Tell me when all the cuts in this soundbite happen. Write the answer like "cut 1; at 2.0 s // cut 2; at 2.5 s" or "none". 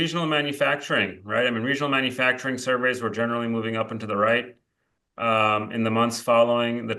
none

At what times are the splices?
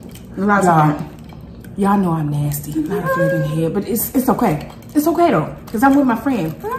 none

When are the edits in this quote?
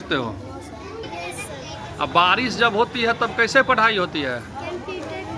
cut 1; at 1.0 s

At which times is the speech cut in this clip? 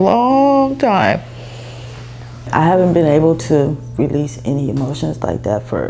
cut 1; at 2.5 s

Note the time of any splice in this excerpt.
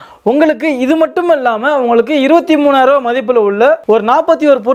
none

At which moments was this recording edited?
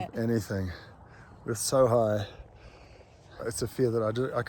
cut 1; at 3.3 s

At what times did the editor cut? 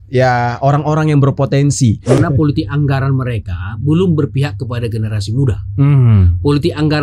cut 1; at 2.2 s

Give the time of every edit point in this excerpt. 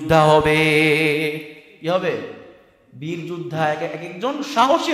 none

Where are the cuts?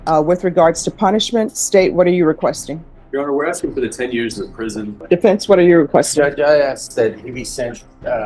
cut 1; at 5.0 s

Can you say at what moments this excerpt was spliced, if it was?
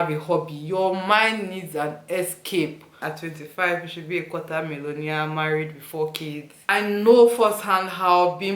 cut 1; at 3.0 s // cut 2; at 6.7 s

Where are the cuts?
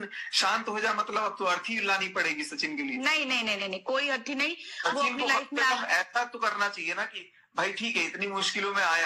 none

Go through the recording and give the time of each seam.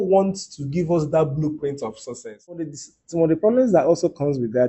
cut 1; at 2.8 s

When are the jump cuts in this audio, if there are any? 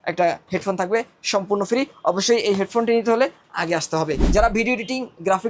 cut 1; at 4.2 s

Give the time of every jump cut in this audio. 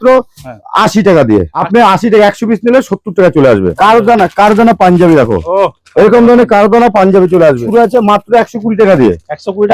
cut 1; at 1.6 s // cut 2; at 3.7 s // cut 3; at 7.6 s

